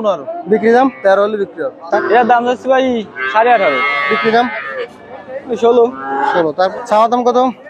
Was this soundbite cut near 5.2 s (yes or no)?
no